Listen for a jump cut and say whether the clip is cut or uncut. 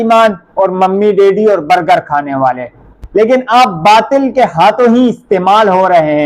cut